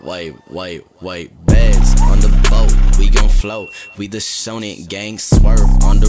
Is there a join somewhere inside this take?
no; 0 cuts

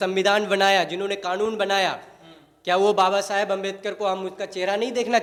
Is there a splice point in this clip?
no; 0 cuts

